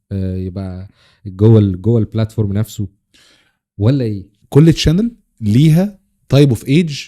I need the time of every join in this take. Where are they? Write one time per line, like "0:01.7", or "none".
0:04.3